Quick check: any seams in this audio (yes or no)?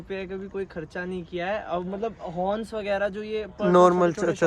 no